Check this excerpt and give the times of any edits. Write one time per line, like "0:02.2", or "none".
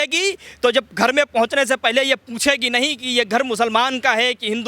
none